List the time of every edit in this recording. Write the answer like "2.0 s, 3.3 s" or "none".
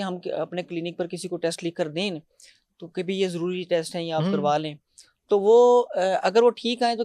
none